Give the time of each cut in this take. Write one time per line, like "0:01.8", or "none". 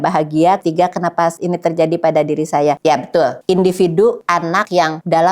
none